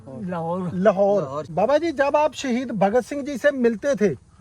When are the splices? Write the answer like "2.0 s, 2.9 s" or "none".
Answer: 1.4 s